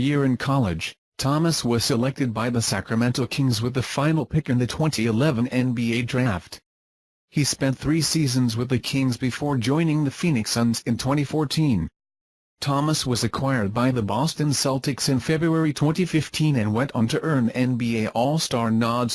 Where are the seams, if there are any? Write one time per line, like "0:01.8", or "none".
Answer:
none

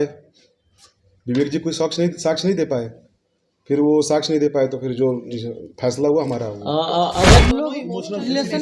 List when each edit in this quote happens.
0:07.4

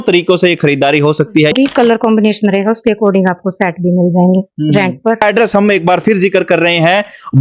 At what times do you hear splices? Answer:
0:01.5
0:05.2

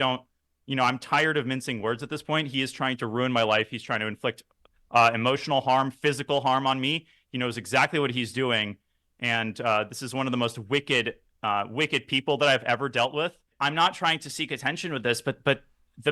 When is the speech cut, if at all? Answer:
0:13.5

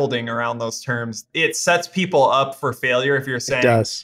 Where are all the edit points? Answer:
0:01.2

